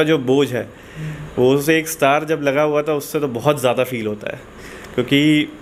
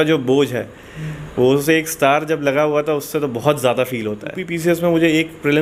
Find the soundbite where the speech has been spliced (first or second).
second